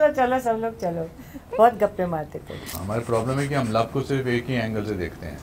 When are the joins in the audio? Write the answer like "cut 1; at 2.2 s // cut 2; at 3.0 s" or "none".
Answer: cut 1; at 2.7 s